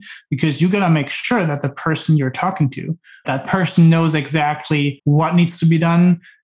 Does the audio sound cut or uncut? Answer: cut